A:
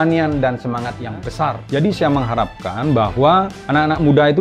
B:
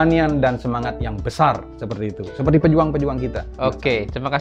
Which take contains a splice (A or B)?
A